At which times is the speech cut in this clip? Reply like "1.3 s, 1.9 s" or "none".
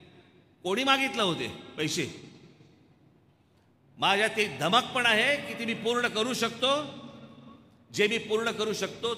3.7 s